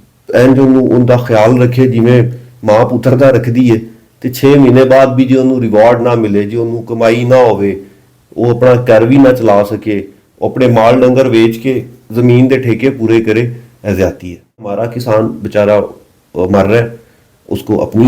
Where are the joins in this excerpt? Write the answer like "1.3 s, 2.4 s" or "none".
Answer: 14.9 s